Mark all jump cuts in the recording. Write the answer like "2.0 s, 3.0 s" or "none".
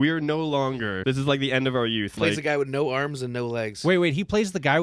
1.0 s, 2.1 s